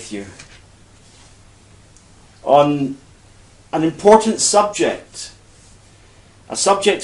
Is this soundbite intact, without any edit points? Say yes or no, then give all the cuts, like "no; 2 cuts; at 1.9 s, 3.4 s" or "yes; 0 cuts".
no; 1 cut; at 1.1 s